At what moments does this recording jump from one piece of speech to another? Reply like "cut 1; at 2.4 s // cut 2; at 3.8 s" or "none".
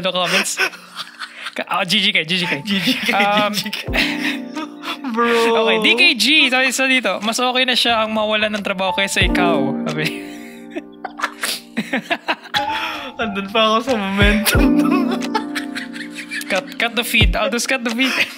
none